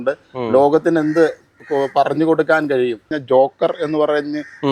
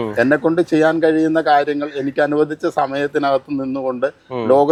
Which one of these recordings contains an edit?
first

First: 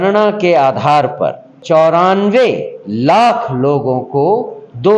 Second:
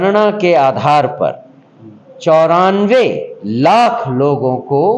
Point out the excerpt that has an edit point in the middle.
first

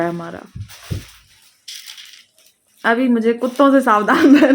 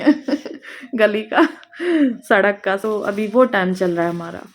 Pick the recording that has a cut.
second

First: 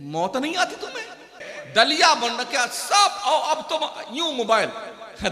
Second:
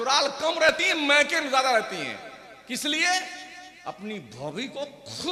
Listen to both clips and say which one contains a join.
first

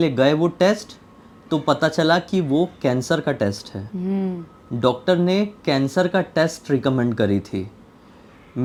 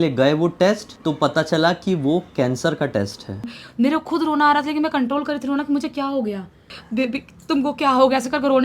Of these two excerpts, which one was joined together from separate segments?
second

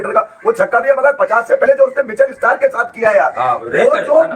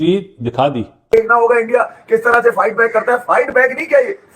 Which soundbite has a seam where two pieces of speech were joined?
second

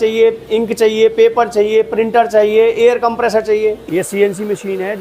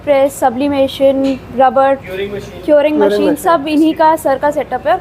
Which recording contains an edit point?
first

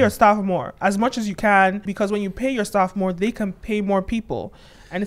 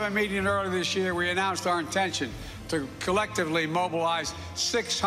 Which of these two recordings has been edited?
first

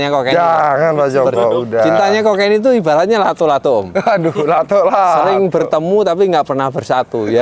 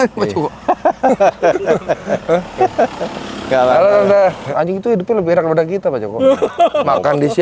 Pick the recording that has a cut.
second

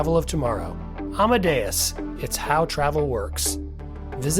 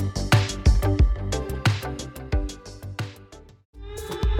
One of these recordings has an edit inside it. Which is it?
second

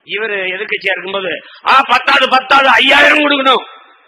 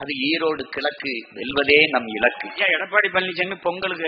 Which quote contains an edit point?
second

